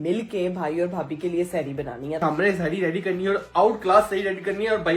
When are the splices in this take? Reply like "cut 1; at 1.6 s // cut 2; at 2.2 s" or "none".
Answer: cut 1; at 2.2 s